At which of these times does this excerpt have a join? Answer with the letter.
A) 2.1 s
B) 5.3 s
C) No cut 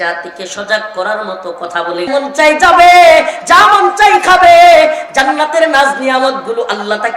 A